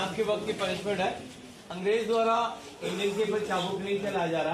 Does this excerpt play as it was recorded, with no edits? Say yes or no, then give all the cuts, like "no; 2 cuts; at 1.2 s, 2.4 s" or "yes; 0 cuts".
yes; 0 cuts